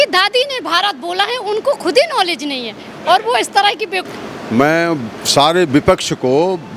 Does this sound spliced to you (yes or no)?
yes